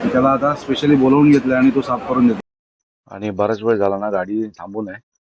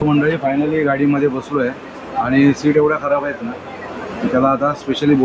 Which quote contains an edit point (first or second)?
first